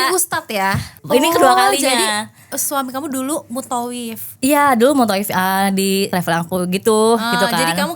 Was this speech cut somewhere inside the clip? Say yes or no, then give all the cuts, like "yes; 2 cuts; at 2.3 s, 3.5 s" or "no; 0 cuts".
yes; 2 cuts; at 0.9 s, 6.1 s